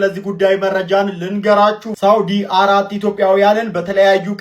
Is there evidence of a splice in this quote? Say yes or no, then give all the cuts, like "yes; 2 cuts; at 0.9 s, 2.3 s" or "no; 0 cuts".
no; 0 cuts